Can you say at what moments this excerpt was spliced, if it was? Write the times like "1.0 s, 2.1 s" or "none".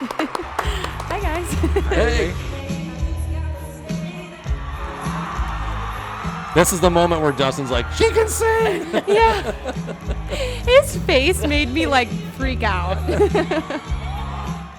2.4 s